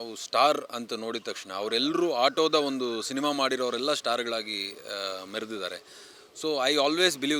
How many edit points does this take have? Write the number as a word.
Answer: zero